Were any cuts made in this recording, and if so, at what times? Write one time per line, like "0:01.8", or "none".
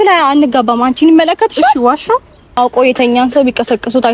0:02.6